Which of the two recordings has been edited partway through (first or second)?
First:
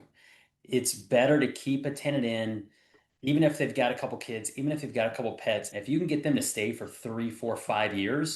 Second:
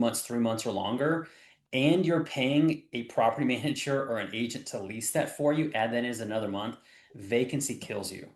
first